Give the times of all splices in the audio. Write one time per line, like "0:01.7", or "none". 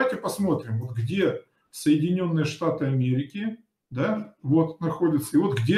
none